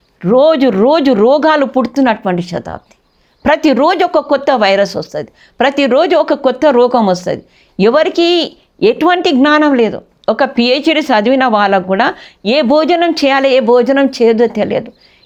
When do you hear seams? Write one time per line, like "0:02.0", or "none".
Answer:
none